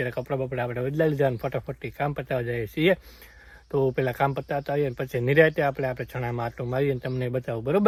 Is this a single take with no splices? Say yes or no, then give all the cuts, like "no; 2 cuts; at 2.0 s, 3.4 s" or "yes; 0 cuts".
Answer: yes; 0 cuts